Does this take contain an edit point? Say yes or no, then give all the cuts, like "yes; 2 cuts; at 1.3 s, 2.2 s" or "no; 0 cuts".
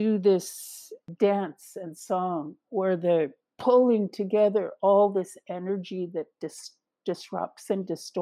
yes; 1 cut; at 1.1 s